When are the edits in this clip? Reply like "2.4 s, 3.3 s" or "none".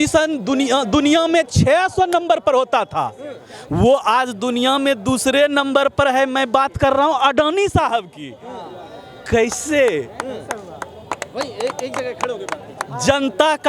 none